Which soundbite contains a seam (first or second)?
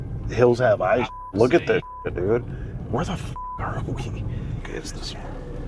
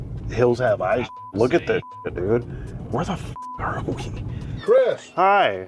second